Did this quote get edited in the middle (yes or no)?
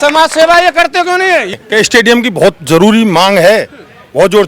yes